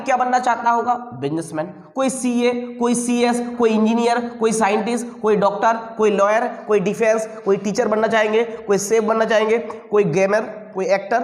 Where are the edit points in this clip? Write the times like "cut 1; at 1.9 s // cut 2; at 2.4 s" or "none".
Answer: none